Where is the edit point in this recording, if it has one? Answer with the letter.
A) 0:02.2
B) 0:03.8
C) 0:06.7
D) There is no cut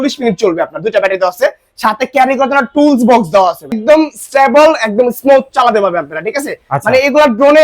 B